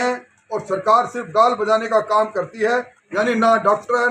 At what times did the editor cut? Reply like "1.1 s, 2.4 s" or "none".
3.0 s